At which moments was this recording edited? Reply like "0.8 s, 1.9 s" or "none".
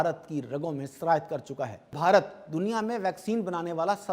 1.9 s